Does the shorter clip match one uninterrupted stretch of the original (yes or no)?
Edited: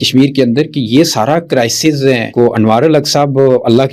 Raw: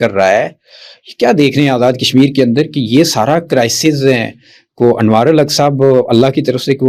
no